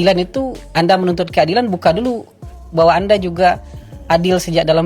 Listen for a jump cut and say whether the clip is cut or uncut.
uncut